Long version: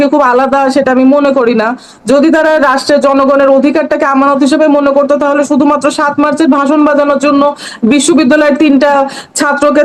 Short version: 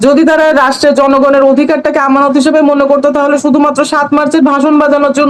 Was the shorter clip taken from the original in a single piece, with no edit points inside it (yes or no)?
yes